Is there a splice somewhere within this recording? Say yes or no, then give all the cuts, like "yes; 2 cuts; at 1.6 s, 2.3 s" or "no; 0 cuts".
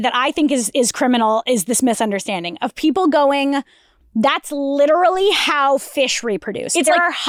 no; 0 cuts